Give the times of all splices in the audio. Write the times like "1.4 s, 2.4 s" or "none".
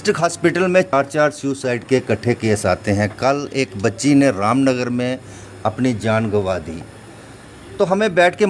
0.9 s